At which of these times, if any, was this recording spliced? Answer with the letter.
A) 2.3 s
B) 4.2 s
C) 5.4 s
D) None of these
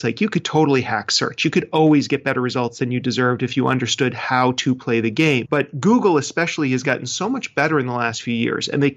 C